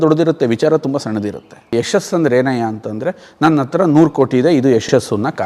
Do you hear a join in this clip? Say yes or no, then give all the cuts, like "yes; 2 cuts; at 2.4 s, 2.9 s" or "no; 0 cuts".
yes; 1 cut; at 1.6 s